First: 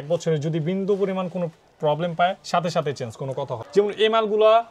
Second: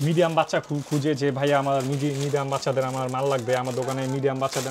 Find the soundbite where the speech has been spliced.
first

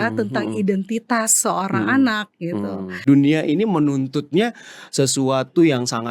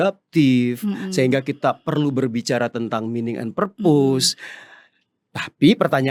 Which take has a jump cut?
first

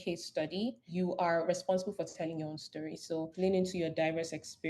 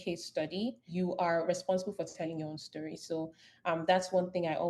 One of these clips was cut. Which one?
first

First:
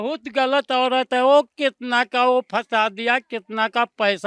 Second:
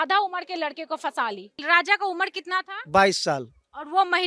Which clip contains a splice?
second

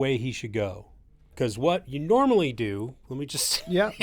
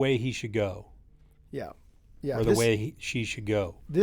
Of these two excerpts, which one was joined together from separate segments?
first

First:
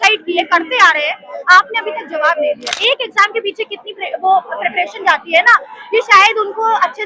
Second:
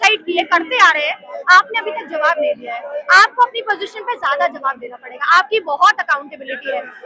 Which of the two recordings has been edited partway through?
first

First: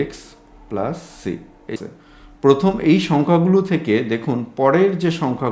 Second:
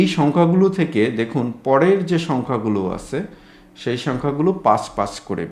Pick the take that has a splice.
first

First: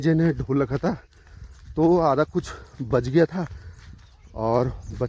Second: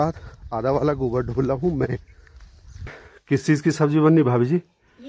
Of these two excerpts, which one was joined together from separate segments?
second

